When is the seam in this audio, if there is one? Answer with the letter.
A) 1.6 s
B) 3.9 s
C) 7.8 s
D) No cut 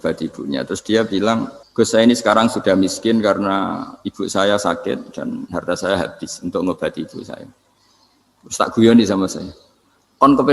A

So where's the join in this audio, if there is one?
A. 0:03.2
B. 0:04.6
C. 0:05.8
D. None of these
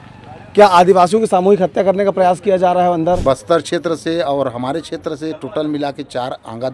A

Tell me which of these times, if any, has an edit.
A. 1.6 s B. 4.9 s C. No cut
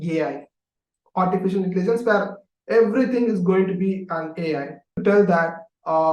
B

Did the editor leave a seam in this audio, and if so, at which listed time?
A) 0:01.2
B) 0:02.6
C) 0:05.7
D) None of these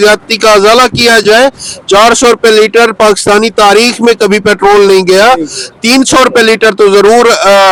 D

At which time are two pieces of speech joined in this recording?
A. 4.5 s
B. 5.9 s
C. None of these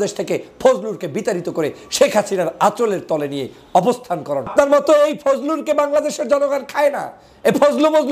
A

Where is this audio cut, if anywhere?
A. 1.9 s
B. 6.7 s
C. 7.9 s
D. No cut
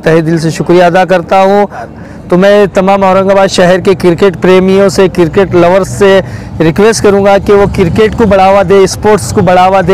A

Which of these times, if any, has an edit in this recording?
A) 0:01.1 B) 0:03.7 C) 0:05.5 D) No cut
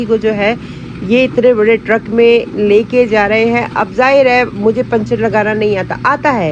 D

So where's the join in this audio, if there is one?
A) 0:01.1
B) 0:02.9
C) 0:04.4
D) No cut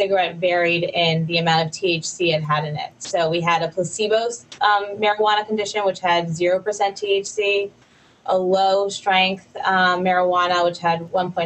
C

